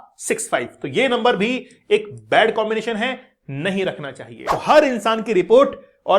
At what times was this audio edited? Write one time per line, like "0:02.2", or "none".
0:04.4